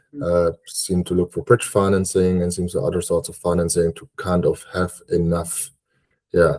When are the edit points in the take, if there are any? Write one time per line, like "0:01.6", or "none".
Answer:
none